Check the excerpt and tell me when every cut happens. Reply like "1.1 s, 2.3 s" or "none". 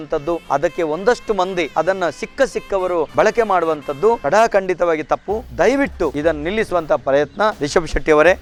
none

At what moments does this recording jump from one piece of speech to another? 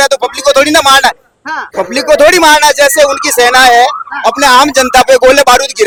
none

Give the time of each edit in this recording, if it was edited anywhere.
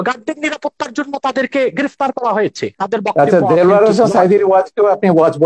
2.7 s

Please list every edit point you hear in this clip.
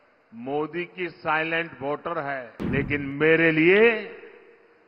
2.5 s

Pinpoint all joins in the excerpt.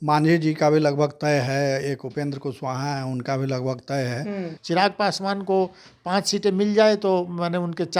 4.5 s

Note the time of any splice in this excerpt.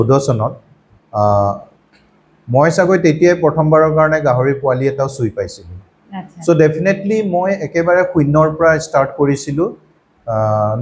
none

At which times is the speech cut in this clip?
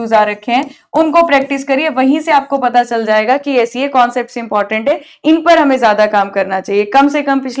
none

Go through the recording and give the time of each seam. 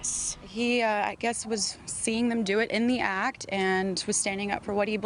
none

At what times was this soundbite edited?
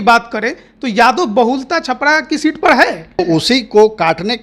3.2 s

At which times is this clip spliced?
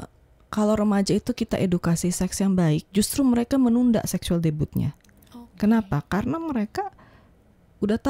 none

